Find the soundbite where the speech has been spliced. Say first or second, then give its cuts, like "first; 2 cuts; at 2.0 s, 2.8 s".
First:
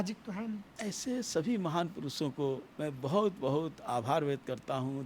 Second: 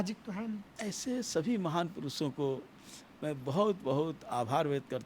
first; 1 cut; at 2.7 s